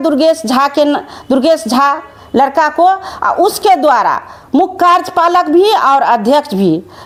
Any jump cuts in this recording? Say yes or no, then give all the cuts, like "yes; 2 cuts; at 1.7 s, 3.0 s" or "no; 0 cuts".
no; 0 cuts